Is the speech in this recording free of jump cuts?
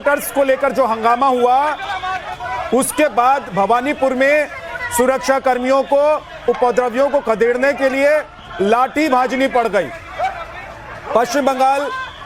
yes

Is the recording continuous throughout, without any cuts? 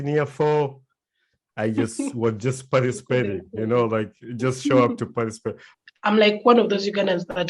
no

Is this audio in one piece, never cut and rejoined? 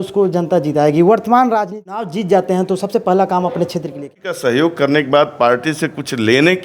no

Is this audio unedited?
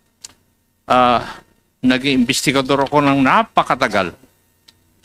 yes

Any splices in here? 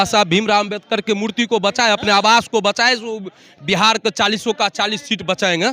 no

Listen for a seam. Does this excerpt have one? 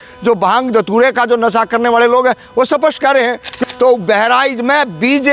yes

